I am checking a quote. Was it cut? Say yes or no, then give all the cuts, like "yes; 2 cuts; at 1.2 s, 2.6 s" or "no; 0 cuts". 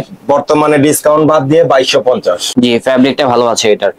yes; 1 cut; at 2.4 s